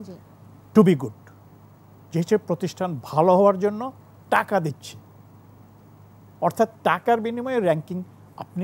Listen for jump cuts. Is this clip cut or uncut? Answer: uncut